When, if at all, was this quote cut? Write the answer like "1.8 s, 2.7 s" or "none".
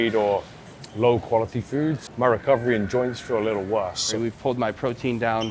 2.1 s, 4.1 s

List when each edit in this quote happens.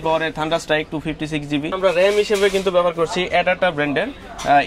1.7 s

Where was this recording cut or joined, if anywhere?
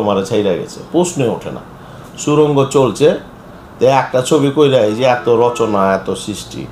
none

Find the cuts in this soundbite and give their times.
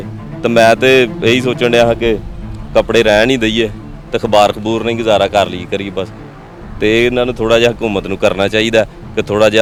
none

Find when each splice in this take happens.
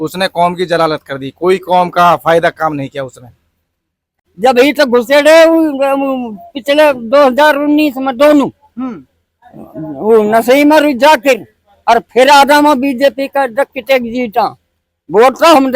4.2 s

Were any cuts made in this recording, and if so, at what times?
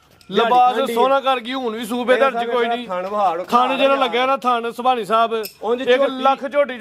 none

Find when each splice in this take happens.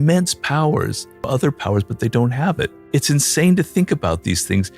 1.2 s, 2.8 s

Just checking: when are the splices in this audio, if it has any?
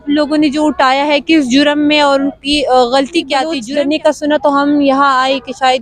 3.6 s

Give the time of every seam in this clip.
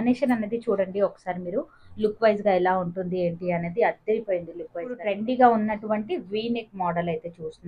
5.0 s

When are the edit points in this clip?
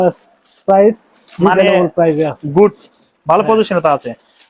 none

